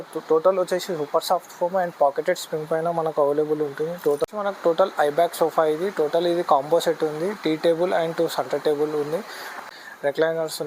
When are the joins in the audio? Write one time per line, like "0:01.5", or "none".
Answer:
0:04.2
0:09.5